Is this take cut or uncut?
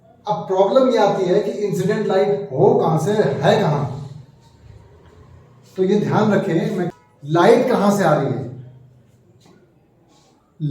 cut